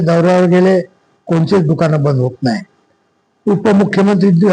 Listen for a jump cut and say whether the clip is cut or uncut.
uncut